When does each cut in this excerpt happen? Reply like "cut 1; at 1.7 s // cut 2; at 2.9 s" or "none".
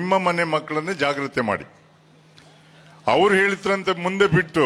none